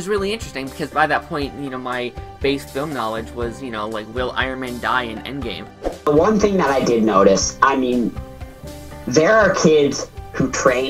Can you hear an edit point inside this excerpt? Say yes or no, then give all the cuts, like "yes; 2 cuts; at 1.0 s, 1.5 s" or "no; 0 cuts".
yes; 1 cut; at 6.1 s